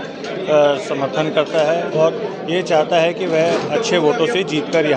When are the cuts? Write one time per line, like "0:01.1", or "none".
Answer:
none